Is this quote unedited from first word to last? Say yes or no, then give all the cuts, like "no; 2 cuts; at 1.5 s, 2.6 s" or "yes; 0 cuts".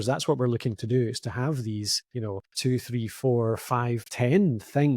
no; 1 cut; at 2.1 s